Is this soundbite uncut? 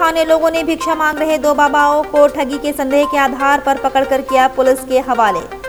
yes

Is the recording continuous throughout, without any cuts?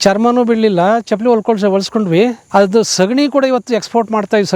no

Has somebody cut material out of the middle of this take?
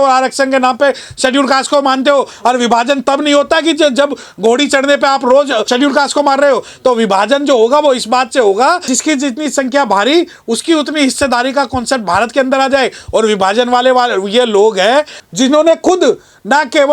yes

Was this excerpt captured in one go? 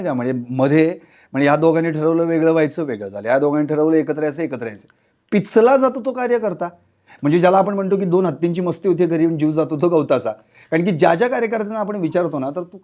yes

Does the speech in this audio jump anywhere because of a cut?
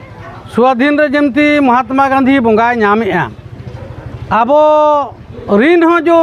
no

